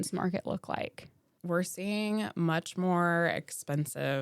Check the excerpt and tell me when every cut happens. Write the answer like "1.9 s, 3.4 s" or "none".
1.3 s